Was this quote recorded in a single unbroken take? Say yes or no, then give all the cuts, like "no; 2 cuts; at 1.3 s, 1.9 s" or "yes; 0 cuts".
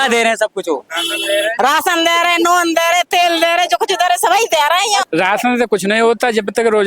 no; 1 cut; at 5.0 s